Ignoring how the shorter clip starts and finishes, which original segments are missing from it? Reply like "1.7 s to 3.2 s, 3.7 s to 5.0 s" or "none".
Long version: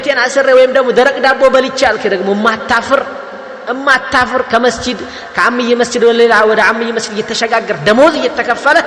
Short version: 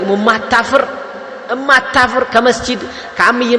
none